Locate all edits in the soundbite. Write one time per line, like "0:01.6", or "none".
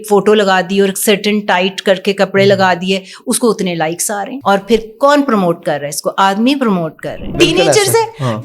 0:04.3
0:07.3